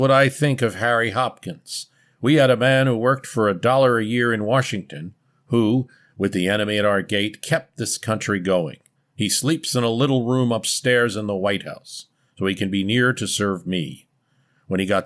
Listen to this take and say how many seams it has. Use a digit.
0